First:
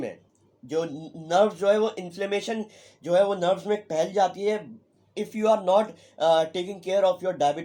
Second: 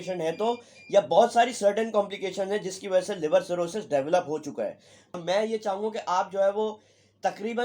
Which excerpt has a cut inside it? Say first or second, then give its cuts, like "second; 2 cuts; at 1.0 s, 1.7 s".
second; 1 cut; at 5.2 s